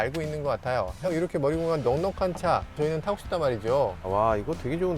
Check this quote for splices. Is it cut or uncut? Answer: cut